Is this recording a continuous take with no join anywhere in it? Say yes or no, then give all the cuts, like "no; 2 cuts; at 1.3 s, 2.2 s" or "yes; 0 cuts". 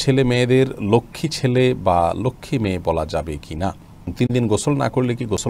no; 1 cut; at 4.1 s